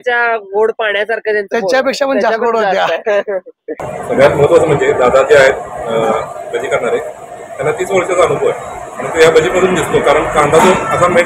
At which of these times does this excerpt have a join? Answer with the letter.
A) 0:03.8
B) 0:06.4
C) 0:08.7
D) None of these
A